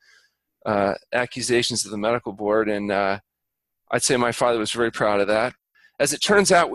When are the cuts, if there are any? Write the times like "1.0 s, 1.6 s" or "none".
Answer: 5.6 s